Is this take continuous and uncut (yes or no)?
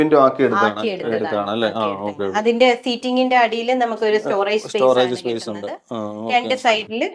yes